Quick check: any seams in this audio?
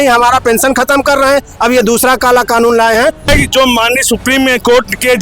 yes; 1 cut; at 3.3 s

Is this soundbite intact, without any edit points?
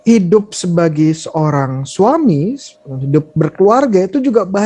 yes; 0 cuts

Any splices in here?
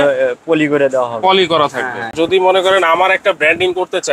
yes; 1 cut; at 2.1 s

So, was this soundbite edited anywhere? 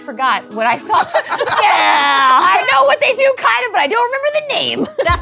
no; 0 cuts

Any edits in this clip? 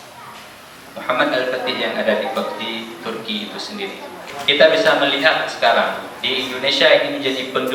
yes; 1 cut; at 4.3 s

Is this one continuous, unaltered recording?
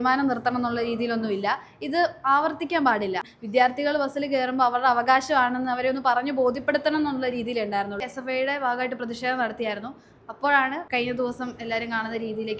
no; 3 cuts; at 3.3 s, 8.1 s, 10.8 s

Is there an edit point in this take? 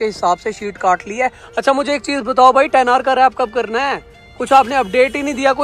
no; 0 cuts

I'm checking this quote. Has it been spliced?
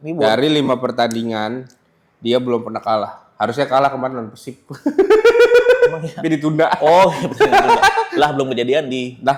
no; 0 cuts

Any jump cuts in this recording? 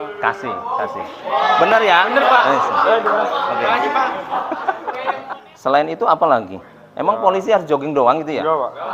yes; 1 cut; at 5.2 s

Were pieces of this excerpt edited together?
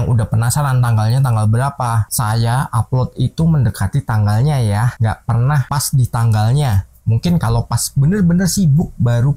no; 0 cuts

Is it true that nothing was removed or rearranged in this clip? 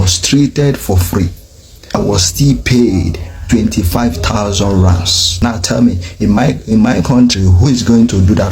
no; 2 cuts; at 1.9 s, 5.4 s

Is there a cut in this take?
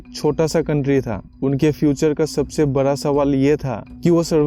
no; 0 cuts

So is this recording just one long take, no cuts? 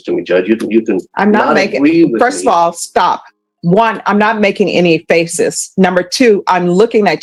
yes; 0 cuts

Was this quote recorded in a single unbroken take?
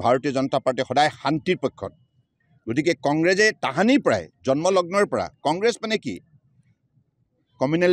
yes; 0 cuts

